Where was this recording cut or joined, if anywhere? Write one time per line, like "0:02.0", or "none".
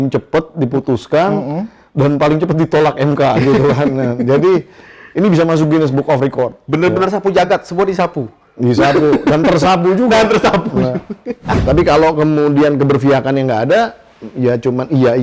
0:11.6